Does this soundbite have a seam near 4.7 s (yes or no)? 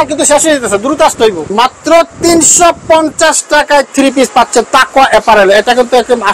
no